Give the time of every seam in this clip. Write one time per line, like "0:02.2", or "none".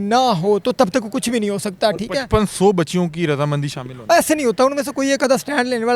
none